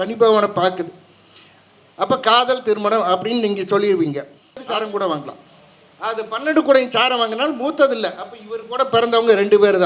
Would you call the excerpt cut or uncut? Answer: cut